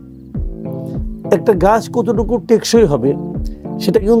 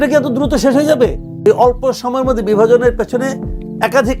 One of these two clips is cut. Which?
second; 1 cut; at 1.3 s

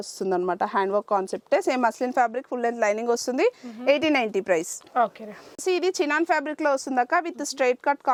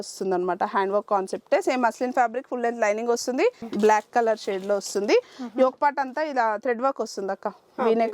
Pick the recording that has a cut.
second; 1 cut; at 3.6 s

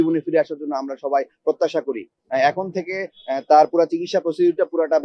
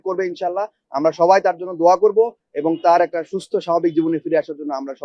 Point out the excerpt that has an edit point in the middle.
first; 1 cut; at 2.2 s

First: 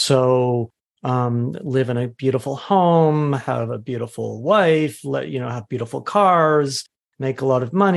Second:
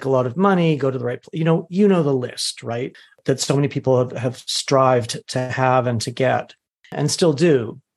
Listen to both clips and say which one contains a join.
second; 2 cuts; at 3.2 s, 6.9 s

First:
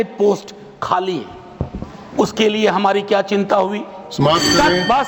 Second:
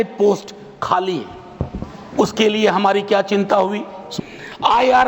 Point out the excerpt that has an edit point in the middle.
second; 1 cut; at 4.0 s

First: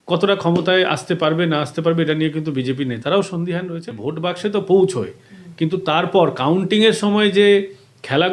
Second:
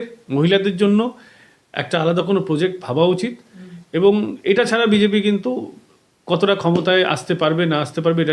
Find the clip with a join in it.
first; 1 cut; at 3.8 s

